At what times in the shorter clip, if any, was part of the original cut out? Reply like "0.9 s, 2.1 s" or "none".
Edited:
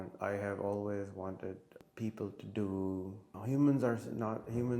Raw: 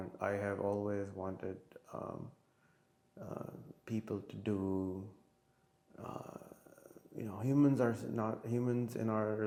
1.8 s, 3.4 s